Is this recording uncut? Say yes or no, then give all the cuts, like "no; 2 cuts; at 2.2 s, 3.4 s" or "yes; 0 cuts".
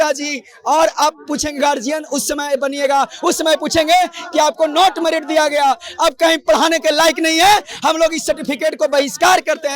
yes; 0 cuts